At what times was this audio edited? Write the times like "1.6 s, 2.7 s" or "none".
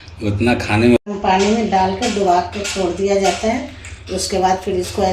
1.0 s